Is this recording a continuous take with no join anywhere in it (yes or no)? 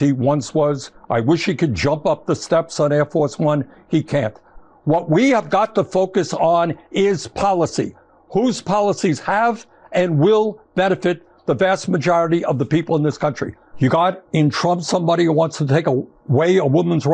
no